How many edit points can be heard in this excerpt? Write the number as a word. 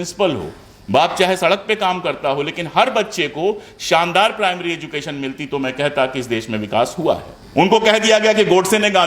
one